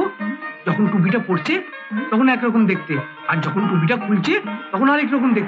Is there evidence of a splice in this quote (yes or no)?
no